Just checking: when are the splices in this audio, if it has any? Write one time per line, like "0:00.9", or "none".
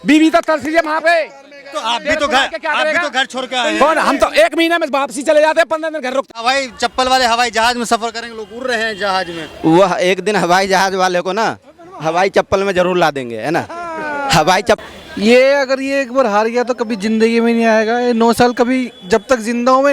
0:06.3
0:14.8